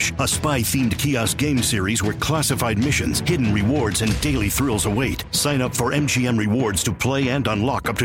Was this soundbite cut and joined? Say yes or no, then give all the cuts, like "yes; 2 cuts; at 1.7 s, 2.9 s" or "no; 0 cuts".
no; 0 cuts